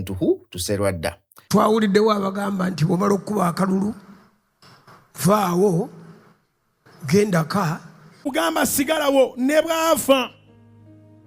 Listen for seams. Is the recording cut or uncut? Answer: cut